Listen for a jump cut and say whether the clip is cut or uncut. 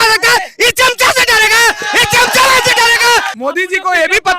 cut